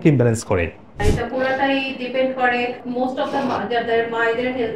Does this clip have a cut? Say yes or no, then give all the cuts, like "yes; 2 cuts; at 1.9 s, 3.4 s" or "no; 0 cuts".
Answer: yes; 1 cut; at 1.0 s